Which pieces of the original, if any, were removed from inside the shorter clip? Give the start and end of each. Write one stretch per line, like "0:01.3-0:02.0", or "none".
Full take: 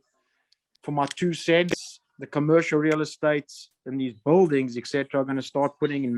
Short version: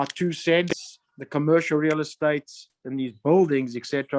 none